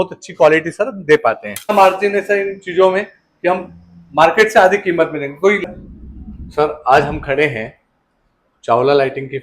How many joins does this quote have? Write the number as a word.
two